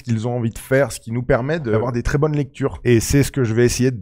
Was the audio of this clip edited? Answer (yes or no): yes